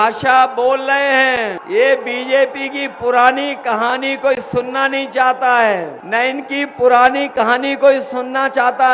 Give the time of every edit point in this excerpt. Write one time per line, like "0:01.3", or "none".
0:01.6
0:06.0